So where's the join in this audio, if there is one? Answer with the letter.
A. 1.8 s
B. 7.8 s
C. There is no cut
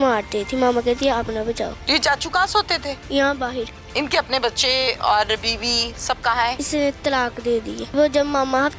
B